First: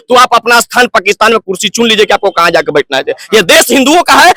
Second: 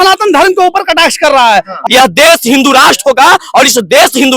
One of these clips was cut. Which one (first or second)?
second